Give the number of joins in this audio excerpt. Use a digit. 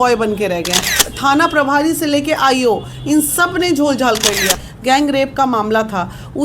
2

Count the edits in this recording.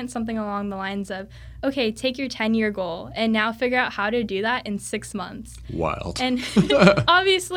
0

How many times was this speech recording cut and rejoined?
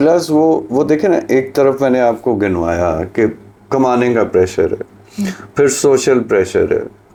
0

